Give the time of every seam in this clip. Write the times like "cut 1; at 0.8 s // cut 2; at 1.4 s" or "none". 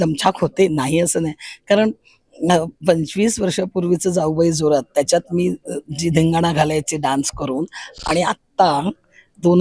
none

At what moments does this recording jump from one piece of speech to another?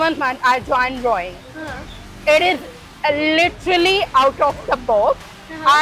none

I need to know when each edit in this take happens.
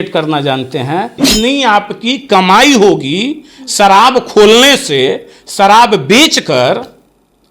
cut 1; at 1.2 s

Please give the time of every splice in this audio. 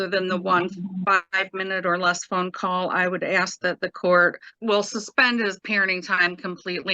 cut 1; at 4.5 s

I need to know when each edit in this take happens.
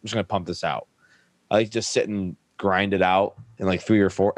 cut 1; at 3.4 s

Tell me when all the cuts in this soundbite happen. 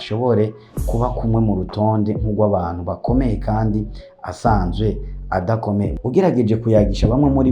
cut 1; at 5.9 s

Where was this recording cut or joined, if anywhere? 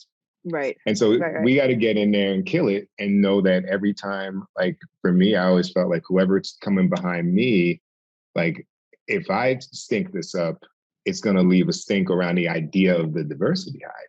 none

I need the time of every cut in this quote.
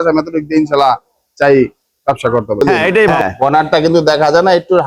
cut 1; at 3.2 s

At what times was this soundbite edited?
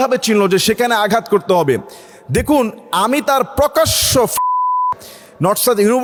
none

